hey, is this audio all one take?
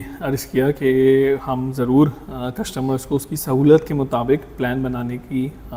yes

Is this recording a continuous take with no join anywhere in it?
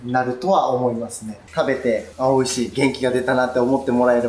no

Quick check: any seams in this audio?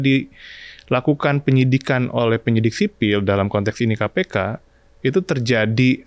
no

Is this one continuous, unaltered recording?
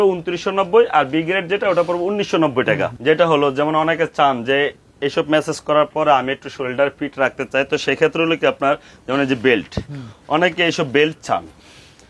yes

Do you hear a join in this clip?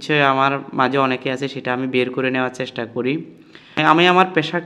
yes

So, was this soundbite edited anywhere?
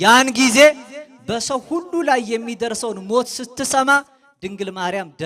no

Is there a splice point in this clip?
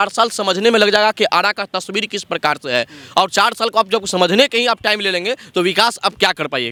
no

